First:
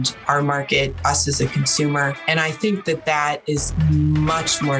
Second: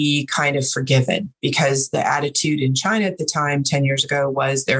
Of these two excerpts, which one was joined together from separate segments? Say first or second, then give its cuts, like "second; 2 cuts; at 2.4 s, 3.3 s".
first; 3 cuts; at 0.9 s, 2.2 s, 3.7 s